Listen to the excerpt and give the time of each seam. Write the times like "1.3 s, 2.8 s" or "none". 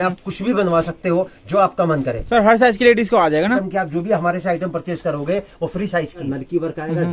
2.2 s, 3.6 s, 6.2 s